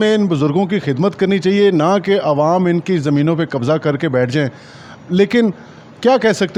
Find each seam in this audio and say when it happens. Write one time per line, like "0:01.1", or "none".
none